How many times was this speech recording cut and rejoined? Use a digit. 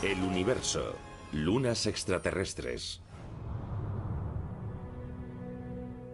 1